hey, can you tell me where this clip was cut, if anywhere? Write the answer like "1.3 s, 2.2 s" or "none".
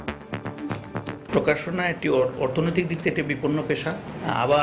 1.2 s